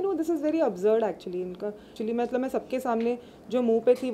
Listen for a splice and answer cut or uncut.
cut